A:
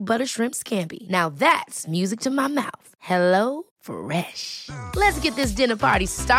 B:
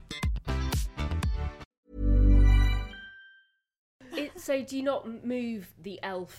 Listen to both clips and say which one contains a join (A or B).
B